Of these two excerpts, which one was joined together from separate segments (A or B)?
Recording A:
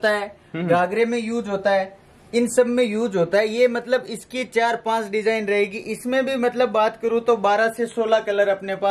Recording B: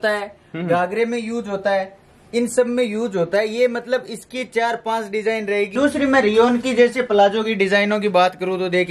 B